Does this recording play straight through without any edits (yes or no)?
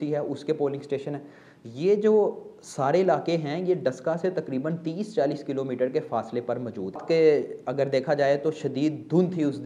no